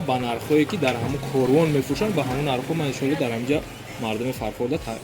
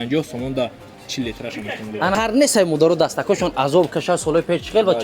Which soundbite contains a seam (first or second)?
second